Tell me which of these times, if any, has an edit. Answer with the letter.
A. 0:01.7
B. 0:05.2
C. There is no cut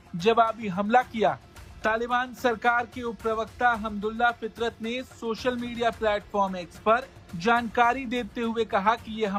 C